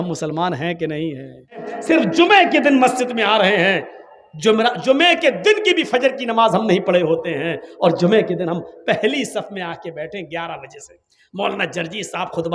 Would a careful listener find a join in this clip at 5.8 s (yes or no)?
no